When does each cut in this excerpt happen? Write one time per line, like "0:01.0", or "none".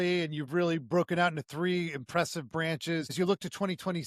0:03.1

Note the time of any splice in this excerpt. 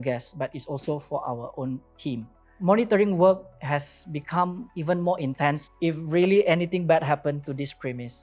0:02.6
0:05.6

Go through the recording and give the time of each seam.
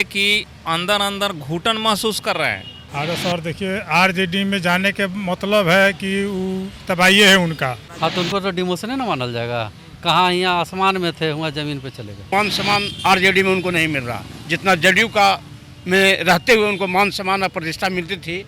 0:02.8
0:07.9
0:12.3

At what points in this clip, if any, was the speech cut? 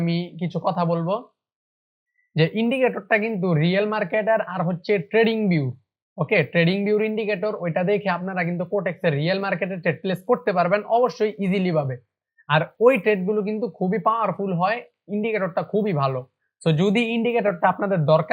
none

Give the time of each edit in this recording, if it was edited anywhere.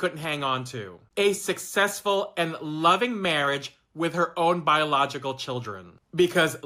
none

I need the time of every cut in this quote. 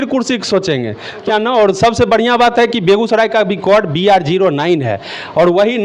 0:01.2

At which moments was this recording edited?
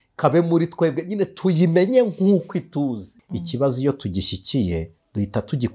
0:03.1

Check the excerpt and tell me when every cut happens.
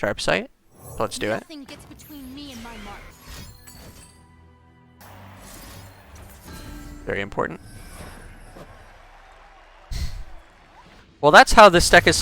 0:03.1
0:05.0
0:10.9

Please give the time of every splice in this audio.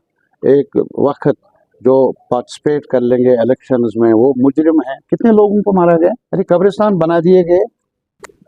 0:06.3

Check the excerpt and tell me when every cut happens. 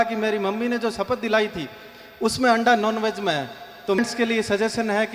0:04.0

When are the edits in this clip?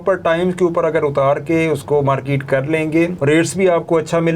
0:03.2

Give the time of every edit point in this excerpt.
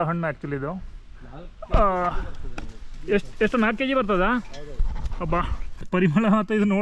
0:05.9

